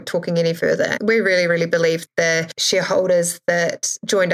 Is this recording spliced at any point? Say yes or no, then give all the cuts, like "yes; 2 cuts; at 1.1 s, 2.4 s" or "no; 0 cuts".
yes; 1 cut; at 0.9 s